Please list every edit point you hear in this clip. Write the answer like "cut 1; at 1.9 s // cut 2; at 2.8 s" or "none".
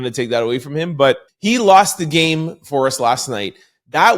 cut 1; at 1.3 s